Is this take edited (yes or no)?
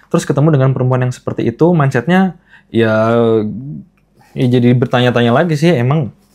no